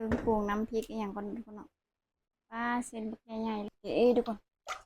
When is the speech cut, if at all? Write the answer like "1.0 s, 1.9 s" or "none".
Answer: 3.7 s